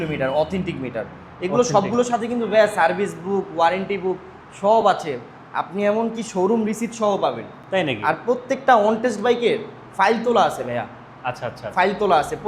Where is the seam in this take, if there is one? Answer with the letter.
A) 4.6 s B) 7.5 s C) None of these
C